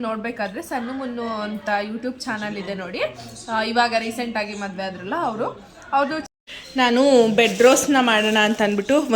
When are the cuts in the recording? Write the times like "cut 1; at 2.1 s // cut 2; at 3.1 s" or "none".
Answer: cut 1; at 6.3 s